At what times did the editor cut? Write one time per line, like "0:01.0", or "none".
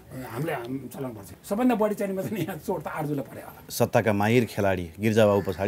0:01.3
0:03.6